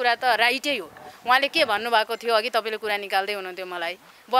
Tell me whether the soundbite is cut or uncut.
uncut